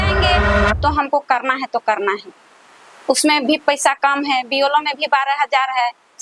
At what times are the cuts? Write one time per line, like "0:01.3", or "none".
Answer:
none